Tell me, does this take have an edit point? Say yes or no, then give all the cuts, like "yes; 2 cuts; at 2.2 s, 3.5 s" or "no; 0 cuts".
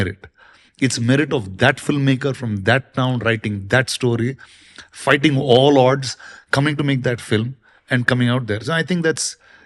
no; 0 cuts